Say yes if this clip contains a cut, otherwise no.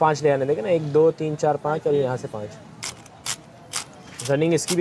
yes